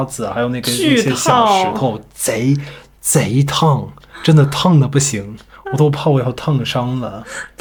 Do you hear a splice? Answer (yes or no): no